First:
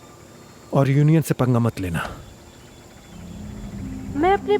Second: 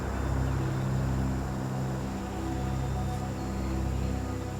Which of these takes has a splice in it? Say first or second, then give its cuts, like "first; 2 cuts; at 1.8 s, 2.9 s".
first; 1 cut; at 3.4 s